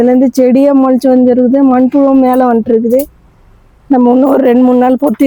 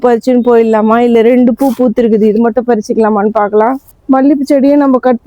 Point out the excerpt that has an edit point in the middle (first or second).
second